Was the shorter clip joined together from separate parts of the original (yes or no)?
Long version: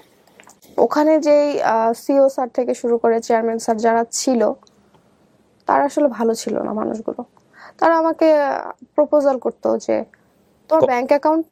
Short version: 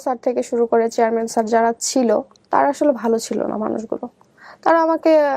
yes